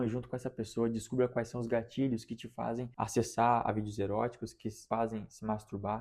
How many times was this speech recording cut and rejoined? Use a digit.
2